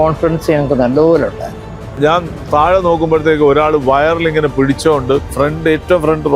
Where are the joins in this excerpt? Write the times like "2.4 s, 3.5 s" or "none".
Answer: 2.0 s, 5.3 s